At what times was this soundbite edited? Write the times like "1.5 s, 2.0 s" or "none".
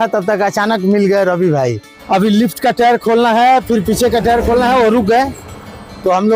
1.9 s